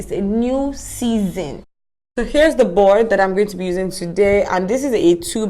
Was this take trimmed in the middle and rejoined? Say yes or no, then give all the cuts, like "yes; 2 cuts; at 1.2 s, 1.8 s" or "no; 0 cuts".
yes; 1 cut; at 1.6 s